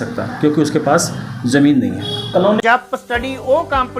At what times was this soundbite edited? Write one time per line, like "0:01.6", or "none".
0:02.6